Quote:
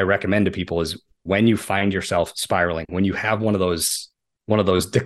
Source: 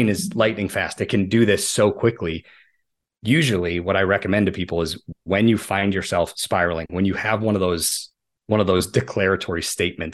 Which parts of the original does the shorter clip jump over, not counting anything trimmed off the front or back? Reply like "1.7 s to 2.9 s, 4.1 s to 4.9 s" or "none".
none